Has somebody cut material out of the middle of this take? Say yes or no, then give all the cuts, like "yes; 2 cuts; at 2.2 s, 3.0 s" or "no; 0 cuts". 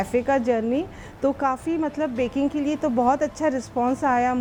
no; 0 cuts